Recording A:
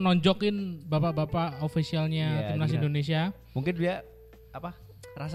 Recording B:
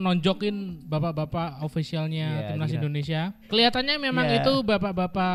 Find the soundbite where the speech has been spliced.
B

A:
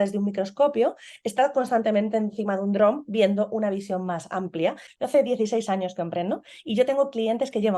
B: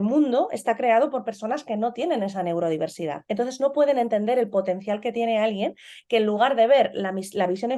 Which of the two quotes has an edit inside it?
A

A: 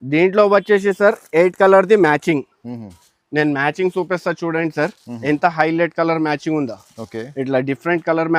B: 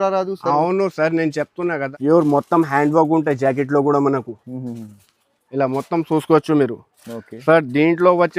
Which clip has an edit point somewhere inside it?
B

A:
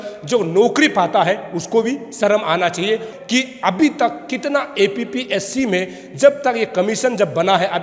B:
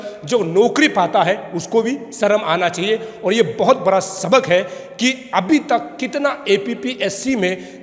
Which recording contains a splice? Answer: A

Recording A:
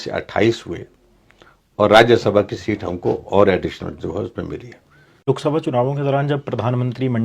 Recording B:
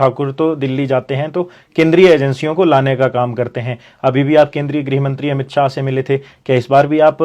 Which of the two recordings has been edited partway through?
A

